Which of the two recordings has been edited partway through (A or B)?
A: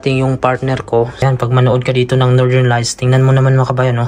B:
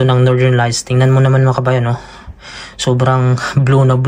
A